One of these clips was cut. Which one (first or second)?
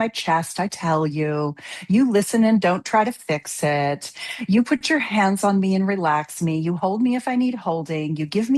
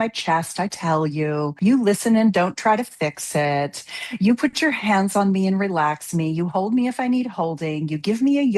second